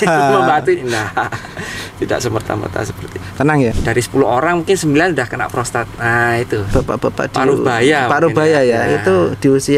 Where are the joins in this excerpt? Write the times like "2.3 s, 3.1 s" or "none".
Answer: 3.8 s, 6.7 s